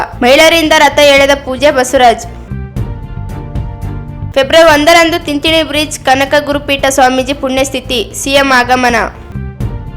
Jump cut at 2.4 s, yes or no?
yes